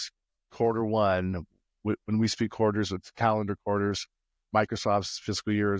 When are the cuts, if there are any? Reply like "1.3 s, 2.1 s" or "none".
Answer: none